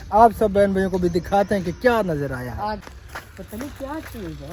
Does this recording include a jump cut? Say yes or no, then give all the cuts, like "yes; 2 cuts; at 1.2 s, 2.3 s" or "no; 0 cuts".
yes; 1 cut; at 2.9 s